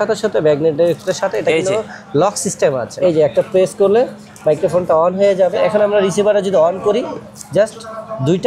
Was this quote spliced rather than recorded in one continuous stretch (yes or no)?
yes